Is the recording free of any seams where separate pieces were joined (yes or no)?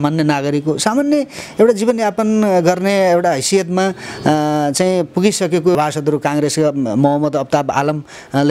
no